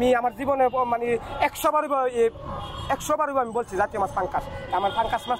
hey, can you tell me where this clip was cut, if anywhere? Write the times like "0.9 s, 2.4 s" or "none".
none